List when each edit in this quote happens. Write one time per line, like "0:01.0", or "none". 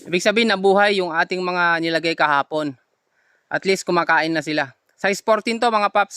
none